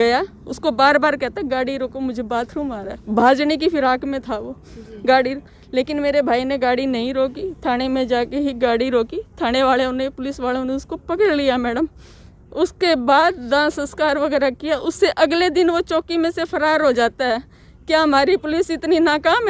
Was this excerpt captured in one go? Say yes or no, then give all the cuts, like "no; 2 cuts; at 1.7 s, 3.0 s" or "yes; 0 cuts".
yes; 0 cuts